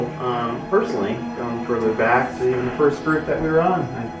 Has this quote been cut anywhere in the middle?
no; 0 cuts

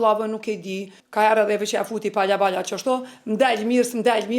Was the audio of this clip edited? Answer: yes; 1 cut; at 1.0 s

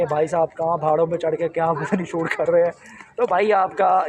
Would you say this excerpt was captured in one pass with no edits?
yes; 0 cuts

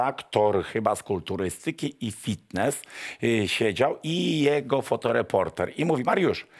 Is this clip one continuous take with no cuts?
yes; 0 cuts

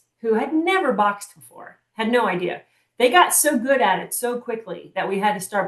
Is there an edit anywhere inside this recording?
no; 0 cuts

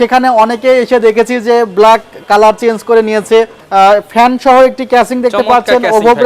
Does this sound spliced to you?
yes; 1 cut; at 3.6 s

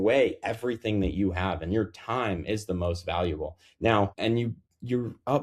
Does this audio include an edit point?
yes; 1 cut; at 4.4 s

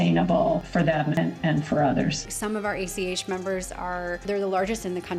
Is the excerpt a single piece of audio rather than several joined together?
no; 3 cuts; at 1.2 s, 2.3 s, 4.2 s

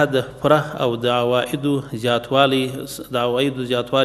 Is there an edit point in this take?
no; 0 cuts

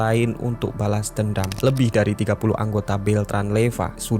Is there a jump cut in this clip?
yes; 1 cut; at 1.6 s

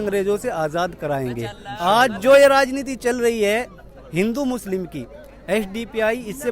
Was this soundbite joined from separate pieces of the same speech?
no; 0 cuts

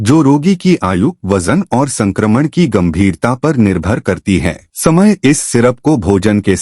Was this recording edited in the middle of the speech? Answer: yes; 1 cut; at 4.6 s

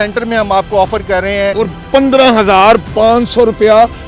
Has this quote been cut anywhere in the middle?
yes; 1 cut; at 1.5 s

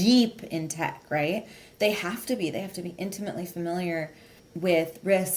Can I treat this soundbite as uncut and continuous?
no; 1 cut; at 4.4 s

